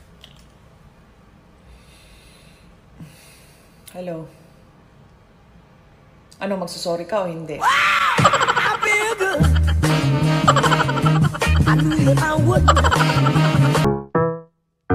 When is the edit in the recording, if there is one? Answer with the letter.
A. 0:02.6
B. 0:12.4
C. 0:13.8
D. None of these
C